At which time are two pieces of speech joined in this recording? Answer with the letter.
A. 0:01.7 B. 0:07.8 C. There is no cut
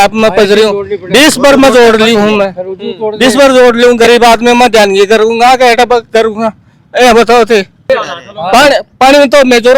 B